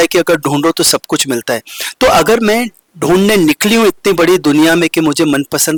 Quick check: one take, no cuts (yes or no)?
yes